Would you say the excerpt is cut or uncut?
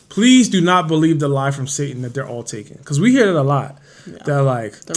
uncut